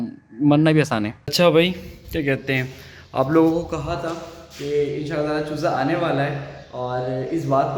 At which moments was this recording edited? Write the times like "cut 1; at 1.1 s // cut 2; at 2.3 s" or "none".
none

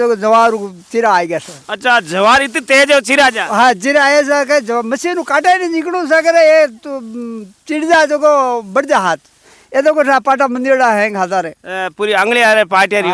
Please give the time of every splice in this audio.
none

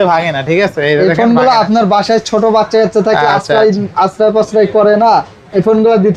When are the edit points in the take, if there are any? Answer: none

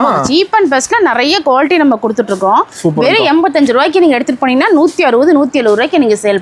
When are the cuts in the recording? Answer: none

